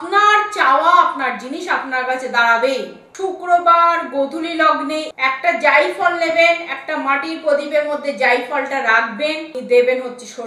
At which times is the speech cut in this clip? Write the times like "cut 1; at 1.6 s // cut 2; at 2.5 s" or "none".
cut 1; at 3.0 s // cut 2; at 5.1 s // cut 3; at 9.5 s